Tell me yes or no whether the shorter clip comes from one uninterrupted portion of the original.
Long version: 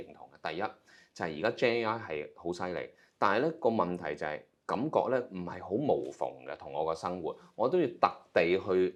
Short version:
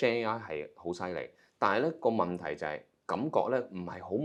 yes